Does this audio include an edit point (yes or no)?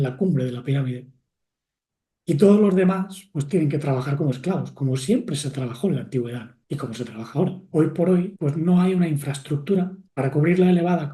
yes